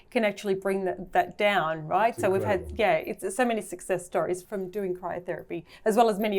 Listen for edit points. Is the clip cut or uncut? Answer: cut